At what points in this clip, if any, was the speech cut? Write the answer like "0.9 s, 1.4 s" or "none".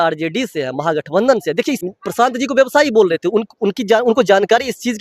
1.9 s